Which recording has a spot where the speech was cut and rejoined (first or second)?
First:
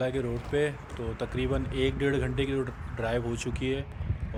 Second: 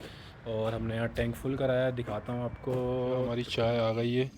second